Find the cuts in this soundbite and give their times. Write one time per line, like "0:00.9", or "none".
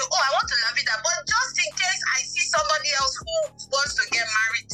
none